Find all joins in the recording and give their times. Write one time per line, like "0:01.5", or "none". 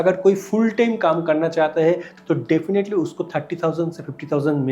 0:02.1